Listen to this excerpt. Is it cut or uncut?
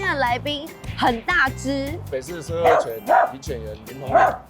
cut